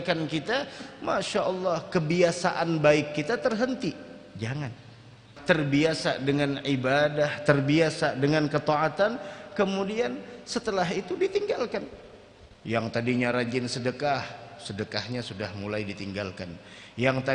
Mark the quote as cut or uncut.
cut